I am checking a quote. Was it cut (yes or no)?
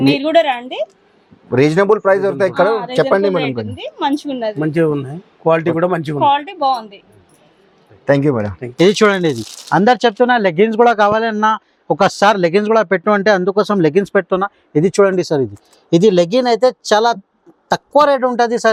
no